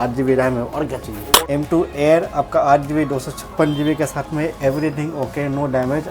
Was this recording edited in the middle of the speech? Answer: yes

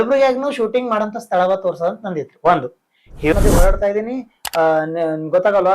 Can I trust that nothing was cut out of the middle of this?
no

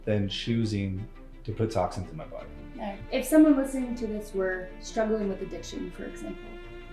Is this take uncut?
no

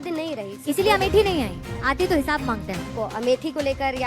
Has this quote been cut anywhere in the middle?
yes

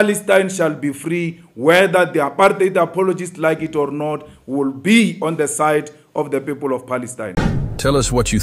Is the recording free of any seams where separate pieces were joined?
no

